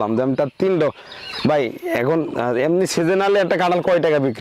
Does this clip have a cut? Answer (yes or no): no